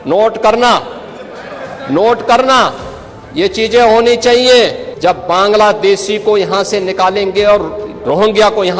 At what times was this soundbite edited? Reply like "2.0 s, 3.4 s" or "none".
4.9 s